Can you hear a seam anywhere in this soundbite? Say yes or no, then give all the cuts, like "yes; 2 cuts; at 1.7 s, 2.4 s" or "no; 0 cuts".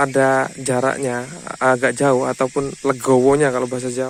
no; 0 cuts